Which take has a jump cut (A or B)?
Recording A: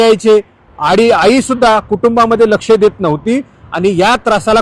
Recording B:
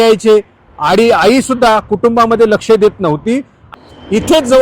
B